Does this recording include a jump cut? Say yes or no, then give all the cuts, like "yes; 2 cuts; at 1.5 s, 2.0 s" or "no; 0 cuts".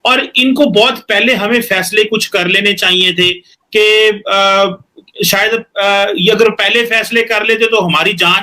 no; 0 cuts